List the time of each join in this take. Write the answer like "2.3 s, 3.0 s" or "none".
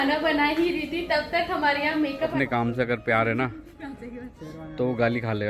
2.3 s